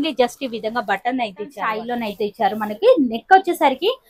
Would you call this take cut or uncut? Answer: cut